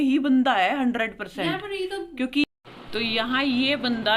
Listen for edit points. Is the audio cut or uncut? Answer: cut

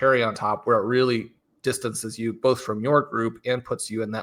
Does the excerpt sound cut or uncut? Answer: uncut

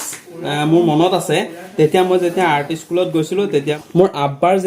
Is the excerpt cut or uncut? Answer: cut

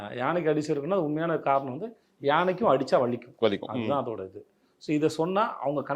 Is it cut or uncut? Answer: uncut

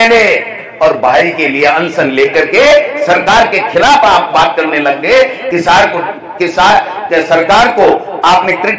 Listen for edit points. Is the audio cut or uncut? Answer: uncut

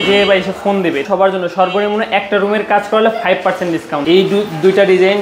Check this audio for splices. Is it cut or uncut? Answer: cut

